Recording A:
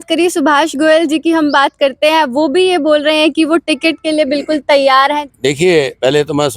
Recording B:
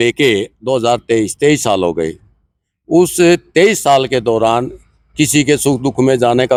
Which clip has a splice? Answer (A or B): A